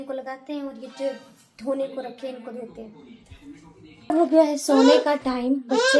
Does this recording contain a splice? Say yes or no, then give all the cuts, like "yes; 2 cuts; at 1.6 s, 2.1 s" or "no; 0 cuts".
yes; 1 cut; at 4.1 s